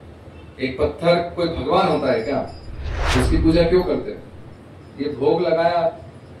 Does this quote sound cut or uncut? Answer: uncut